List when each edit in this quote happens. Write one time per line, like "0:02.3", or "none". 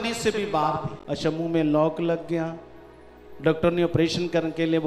0:00.9